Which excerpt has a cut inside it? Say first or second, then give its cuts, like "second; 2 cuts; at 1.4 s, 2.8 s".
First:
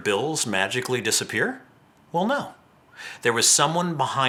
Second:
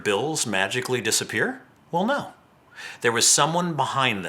second; 1 cut; at 1.7 s